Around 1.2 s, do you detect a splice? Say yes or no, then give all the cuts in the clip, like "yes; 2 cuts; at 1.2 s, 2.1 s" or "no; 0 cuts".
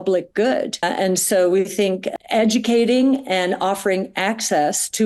no; 0 cuts